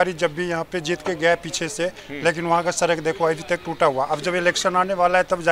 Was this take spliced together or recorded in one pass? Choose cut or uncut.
uncut